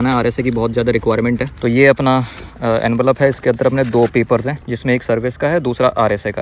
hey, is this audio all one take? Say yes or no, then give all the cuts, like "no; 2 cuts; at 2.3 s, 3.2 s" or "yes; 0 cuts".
yes; 0 cuts